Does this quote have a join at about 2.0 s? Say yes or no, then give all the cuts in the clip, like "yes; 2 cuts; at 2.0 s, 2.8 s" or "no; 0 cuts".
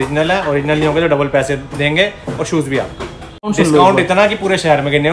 no; 1 cut; at 3.5 s